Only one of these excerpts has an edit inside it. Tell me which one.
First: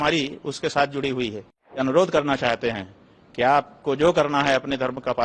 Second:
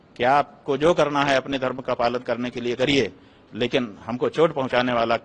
first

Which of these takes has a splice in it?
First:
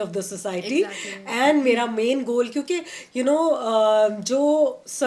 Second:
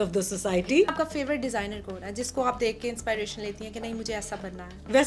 second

